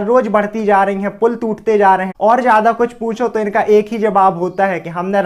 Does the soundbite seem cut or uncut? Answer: cut